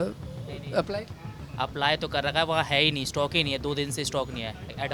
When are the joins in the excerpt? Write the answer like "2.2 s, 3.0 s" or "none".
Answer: none